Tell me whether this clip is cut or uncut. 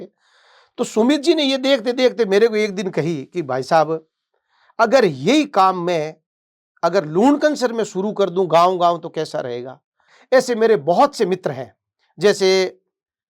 cut